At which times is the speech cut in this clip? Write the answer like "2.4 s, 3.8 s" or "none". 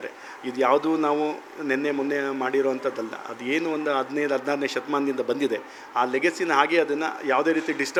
none